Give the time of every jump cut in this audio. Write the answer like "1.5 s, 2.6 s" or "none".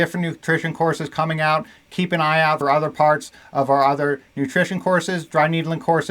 2.6 s